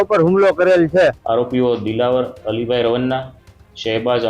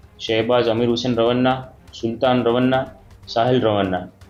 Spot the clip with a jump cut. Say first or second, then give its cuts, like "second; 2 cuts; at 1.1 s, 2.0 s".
first; 1 cut; at 1.2 s